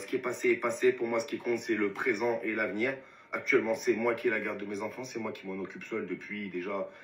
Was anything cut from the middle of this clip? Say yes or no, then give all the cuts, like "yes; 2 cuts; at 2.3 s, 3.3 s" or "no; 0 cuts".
no; 0 cuts